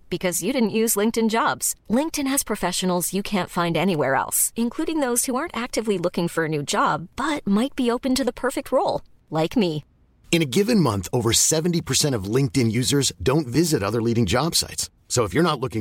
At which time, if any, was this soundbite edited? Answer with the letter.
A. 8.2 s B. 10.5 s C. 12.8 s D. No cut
D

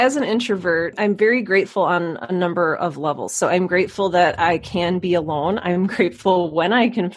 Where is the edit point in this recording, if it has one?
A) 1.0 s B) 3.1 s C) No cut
A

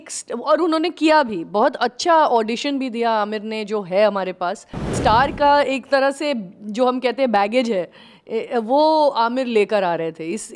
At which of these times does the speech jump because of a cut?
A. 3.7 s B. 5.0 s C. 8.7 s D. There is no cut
B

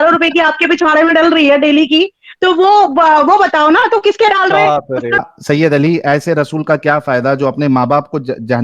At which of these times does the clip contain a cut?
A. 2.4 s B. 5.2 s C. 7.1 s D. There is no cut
B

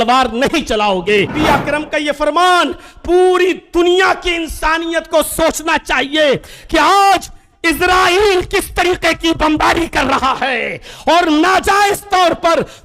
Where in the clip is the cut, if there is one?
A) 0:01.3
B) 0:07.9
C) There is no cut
A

